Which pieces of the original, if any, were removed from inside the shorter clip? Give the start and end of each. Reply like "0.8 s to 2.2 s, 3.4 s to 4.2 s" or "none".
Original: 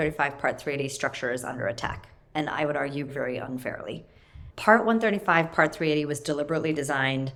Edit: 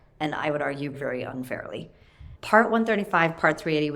none